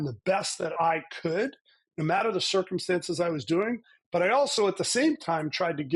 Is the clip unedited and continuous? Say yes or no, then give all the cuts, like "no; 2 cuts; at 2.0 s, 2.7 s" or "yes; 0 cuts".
yes; 0 cuts